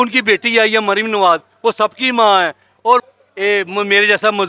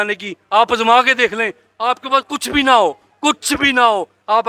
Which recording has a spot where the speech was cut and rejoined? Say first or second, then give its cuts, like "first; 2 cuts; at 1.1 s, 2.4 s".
first; 1 cut; at 3.1 s